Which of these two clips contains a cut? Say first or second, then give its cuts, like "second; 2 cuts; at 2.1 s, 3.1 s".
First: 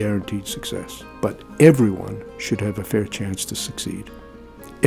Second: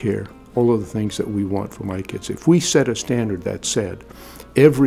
first; 1 cut; at 1.0 s